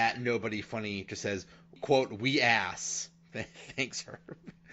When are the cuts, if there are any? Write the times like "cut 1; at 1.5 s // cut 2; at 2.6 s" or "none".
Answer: cut 1; at 1.8 s